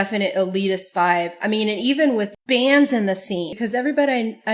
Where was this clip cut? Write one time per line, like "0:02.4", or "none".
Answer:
0:03.5